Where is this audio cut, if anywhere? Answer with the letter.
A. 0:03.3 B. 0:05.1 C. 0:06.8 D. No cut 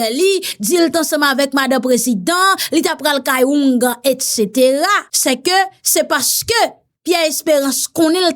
B